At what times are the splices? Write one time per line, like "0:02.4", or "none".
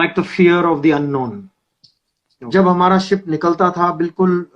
0:02.5